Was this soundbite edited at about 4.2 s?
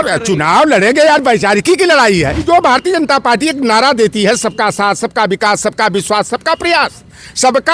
no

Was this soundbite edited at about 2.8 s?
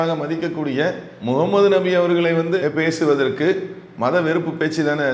no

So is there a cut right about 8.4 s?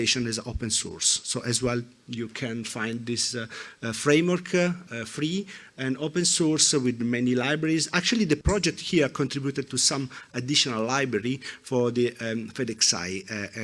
yes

